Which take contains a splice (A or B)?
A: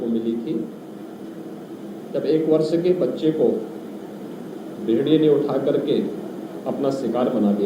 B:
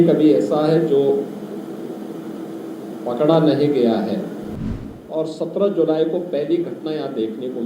B